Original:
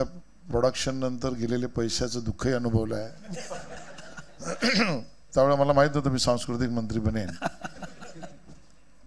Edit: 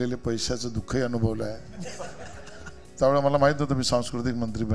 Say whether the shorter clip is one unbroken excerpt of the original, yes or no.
no